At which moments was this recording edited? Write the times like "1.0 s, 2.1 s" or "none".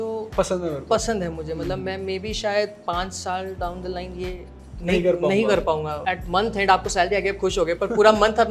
5.9 s